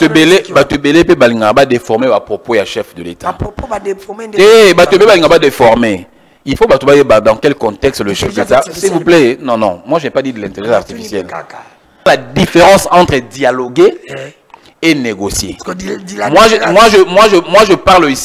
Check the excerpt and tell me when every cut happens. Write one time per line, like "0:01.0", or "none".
0:12.1